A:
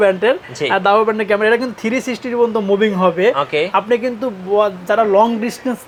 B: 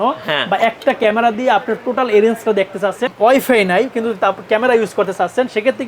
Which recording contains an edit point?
B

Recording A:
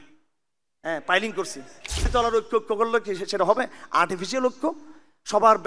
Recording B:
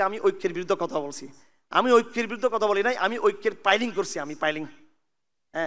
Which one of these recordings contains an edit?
A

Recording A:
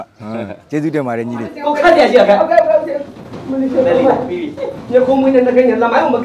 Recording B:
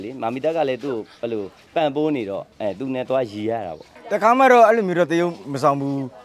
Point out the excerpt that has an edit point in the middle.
B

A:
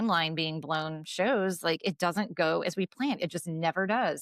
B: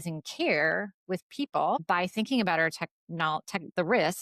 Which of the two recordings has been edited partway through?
B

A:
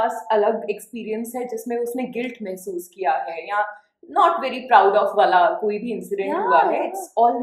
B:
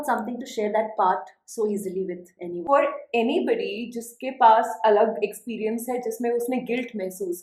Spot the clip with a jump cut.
B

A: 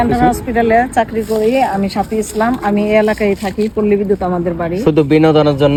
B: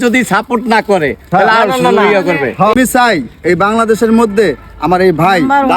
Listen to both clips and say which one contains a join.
B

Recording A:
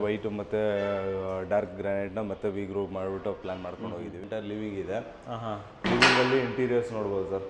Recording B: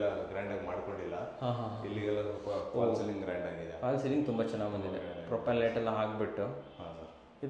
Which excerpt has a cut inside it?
A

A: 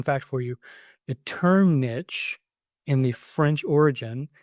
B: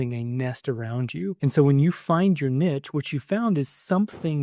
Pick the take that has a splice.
B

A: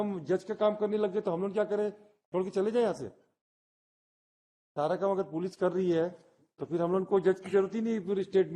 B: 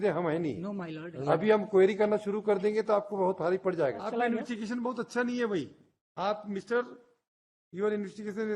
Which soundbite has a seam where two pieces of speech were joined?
B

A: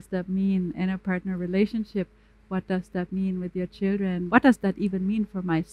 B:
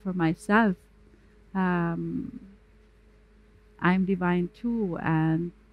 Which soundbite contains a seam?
A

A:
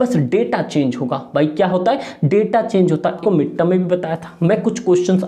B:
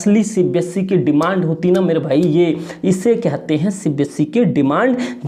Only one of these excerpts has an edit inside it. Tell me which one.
A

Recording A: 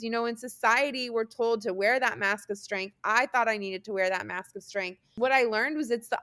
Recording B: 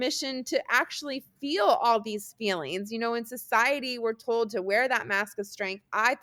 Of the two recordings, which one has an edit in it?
A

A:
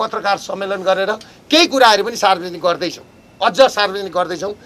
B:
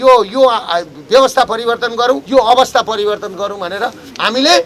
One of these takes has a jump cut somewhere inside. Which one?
B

